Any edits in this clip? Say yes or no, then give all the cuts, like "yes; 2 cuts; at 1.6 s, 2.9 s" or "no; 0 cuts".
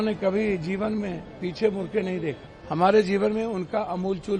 yes; 1 cut; at 2.5 s